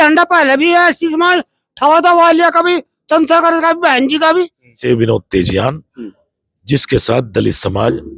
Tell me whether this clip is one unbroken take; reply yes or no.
no